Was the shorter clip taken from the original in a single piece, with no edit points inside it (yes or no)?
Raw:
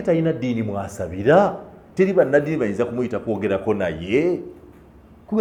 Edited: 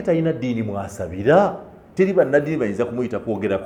yes